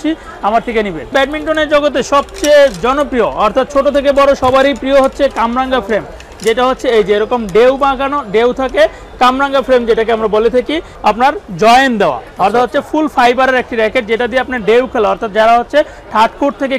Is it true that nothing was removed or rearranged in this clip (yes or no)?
no